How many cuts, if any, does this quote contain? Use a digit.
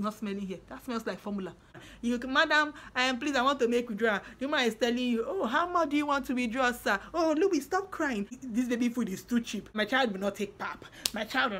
3